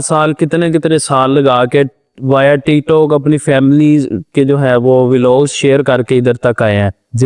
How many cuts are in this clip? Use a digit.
0